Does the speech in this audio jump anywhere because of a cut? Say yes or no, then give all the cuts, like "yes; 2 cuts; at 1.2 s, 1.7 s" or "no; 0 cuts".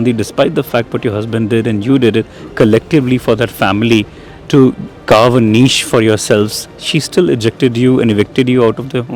no; 0 cuts